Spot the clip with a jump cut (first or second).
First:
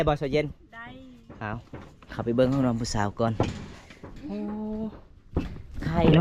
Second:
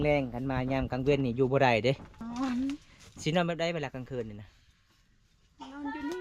second